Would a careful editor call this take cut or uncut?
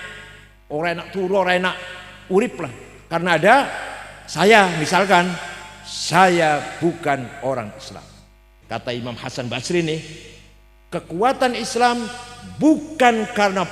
cut